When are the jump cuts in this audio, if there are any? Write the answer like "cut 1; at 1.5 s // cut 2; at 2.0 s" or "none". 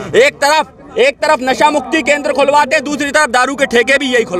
none